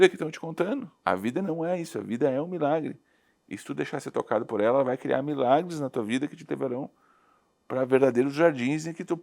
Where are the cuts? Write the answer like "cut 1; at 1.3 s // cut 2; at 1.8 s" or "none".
cut 1; at 0.9 s